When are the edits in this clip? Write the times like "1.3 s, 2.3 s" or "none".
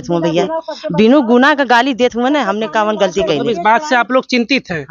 none

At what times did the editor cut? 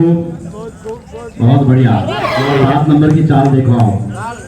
2.5 s

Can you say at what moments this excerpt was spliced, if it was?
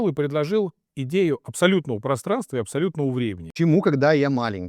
3.4 s

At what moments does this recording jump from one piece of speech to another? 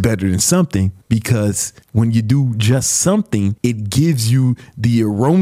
1.0 s, 1.7 s, 3.6 s

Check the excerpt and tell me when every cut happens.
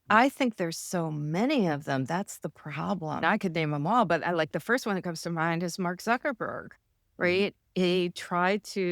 3.2 s

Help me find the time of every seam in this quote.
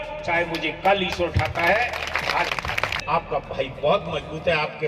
3.0 s

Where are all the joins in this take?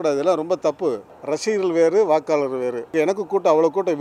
1.1 s, 2.9 s

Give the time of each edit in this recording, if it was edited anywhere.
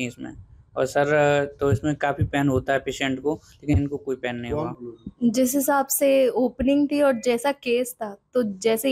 4.8 s

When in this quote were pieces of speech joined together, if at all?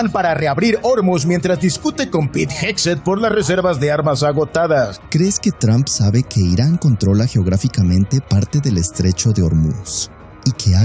5.0 s

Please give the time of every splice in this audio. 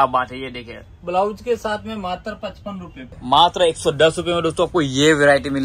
3.0 s

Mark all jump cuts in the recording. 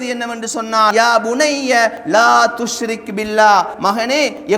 0.9 s

